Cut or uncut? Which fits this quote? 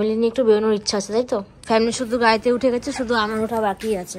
cut